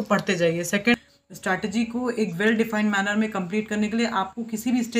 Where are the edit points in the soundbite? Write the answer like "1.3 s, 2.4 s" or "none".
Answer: 0.9 s